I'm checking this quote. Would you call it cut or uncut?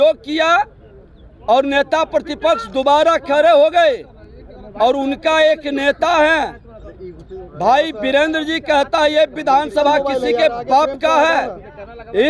uncut